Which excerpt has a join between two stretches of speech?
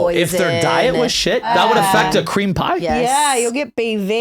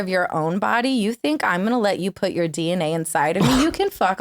first; 1 cut; at 1.5 s

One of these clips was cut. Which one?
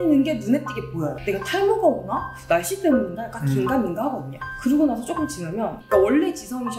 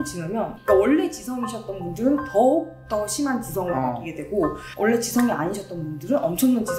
first; 1 cut; at 1.2 s

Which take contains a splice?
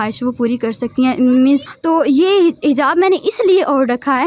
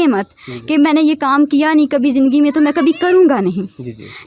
first; 1 cut; at 1.6 s

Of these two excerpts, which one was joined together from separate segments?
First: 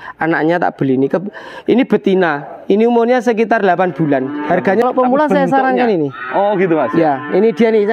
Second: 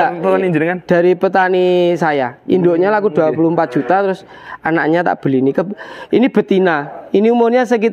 first; 1 cut; at 4.8 s

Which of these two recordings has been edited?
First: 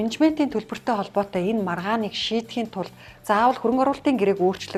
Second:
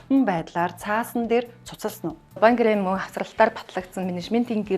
second; 1 cut; at 2.3 s

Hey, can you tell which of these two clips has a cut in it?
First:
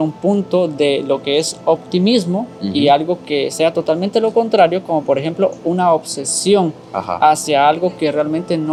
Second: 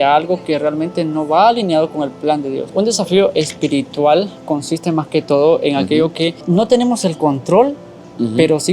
second; 2 cuts; at 2.2 s, 6.4 s

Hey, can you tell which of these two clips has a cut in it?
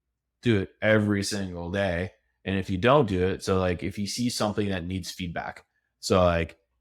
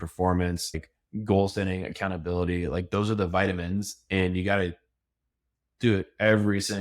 second; 1 cut; at 0.9 s

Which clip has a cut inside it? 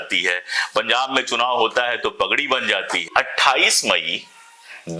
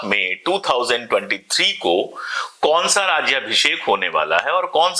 first; 1 cut; at 3.1 s

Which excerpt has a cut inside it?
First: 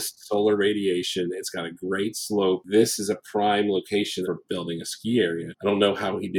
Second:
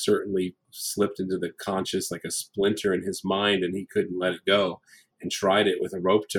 first; 3 cuts; at 2.6 s, 4.3 s, 5.5 s

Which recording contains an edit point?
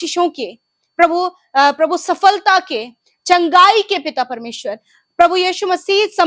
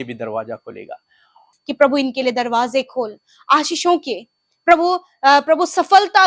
second; 1 cut; at 1.3 s

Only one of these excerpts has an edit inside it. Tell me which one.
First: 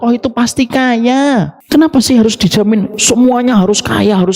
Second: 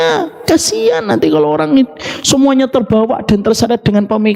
first; 2 cuts; at 1.6 s, 3.0 s

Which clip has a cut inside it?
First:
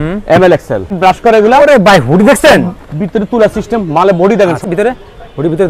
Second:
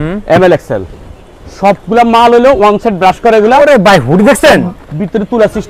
first; 2 cuts; at 0.9 s, 4.6 s

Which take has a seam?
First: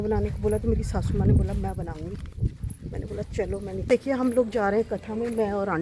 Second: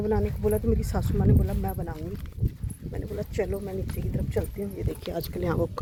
first; 1 cut; at 3.9 s

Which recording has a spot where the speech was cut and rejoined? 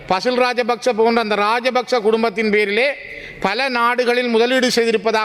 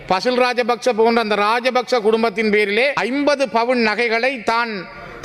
second; 1 cut; at 3.0 s

